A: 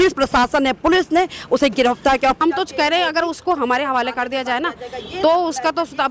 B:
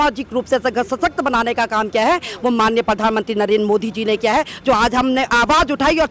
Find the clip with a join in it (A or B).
A